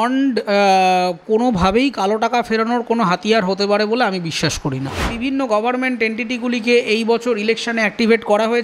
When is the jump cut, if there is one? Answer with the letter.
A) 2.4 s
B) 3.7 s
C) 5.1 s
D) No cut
C